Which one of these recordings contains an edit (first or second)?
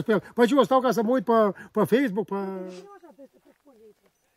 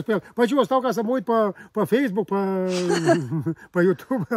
first